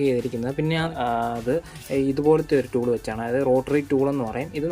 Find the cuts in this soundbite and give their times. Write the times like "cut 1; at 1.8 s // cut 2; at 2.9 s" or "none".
cut 1; at 0.9 s